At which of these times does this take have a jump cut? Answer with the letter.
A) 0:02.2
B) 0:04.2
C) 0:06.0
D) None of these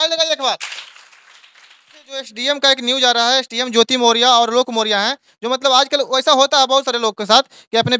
A